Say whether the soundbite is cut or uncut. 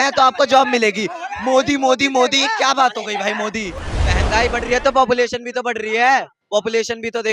cut